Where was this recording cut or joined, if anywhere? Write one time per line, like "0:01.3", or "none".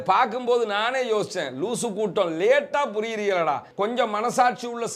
0:03.7